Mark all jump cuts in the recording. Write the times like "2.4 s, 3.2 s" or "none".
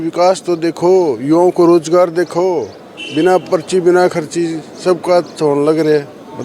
none